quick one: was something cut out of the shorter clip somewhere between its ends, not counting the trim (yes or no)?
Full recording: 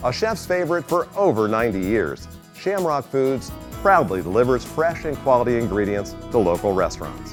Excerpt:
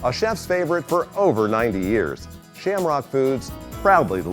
no